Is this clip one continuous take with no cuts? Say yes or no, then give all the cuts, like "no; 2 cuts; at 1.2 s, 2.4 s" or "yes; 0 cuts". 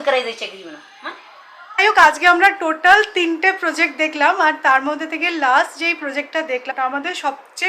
no; 2 cuts; at 1.8 s, 6.7 s